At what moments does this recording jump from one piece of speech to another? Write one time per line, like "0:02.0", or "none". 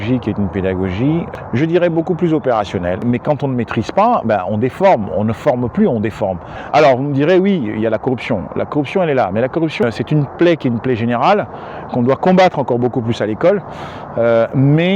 0:01.3
0:03.0
0:06.5
0:09.8